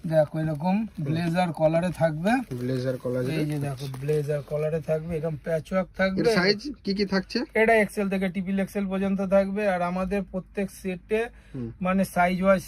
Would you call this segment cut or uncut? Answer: uncut